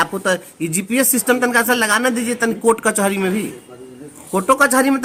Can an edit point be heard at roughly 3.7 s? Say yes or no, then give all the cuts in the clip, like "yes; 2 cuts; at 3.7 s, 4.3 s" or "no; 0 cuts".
no; 0 cuts